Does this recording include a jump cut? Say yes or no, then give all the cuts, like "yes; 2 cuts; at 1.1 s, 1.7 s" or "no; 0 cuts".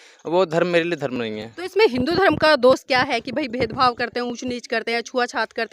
no; 0 cuts